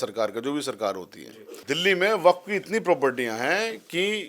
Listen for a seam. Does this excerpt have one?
yes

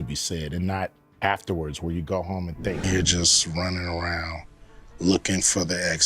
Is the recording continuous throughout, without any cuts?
no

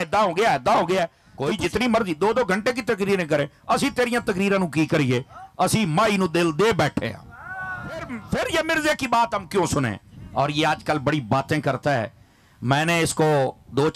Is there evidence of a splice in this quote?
yes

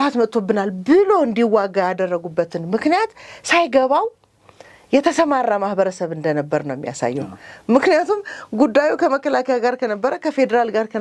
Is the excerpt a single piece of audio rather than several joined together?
yes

